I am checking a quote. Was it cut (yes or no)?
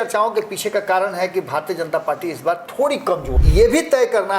yes